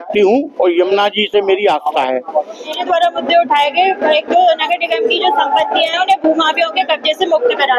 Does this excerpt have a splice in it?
yes; 1 cut; at 2.8 s

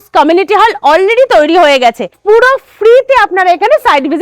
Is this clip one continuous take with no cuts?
no; 1 cut; at 2.1 s

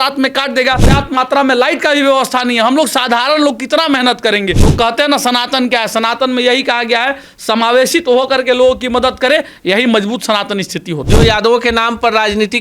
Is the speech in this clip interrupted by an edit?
yes; 3 cuts; at 0.8 s, 4.7 s, 11.0 s

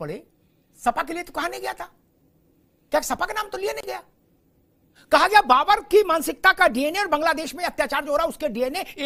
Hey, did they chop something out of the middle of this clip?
no; 0 cuts

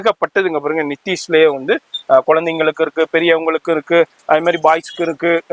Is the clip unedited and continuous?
yes; 0 cuts

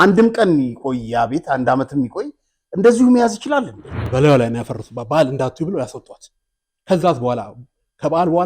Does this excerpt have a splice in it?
yes; 1 cut; at 4.1 s

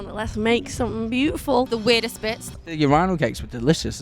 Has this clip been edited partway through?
yes; 1 cut; at 2.1 s

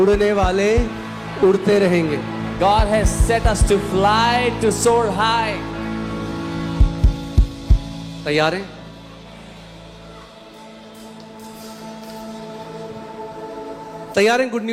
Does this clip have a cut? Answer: no; 0 cuts

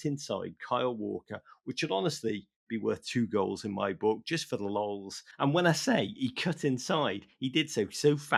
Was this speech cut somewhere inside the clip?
no; 0 cuts

